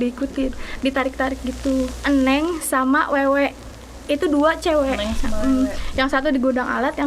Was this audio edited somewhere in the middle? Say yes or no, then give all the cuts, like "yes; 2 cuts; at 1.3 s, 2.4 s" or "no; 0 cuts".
yes; 1 cut; at 1.9 s